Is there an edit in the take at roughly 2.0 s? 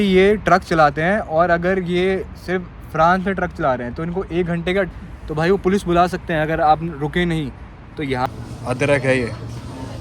no; 2 cuts; at 4.9 s, 8.3 s

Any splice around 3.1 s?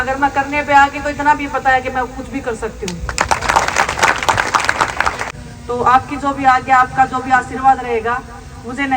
no; 1 cut; at 5.3 s

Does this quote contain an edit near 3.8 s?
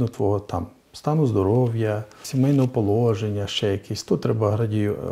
no; 1 cut; at 2.2 s

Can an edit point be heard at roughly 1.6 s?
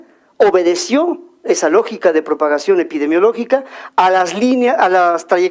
yes; 1 cut; at 1.6 s

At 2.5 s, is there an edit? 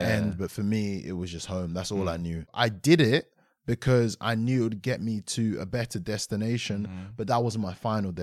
yes; 1 cut; at 2.5 s

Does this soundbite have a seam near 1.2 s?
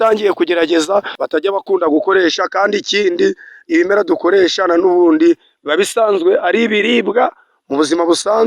yes; 1 cut; at 1.2 s

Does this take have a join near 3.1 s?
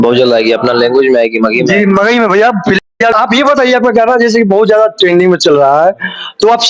yes; 1 cut; at 3.1 s

